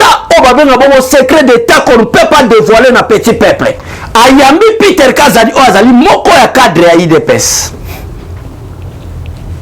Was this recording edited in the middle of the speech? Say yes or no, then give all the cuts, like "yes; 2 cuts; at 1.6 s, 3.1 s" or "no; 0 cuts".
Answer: yes; 1 cut; at 3.9 s